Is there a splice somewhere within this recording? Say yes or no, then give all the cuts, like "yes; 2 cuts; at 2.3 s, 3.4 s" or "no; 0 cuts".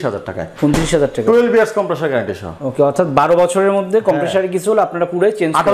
no; 0 cuts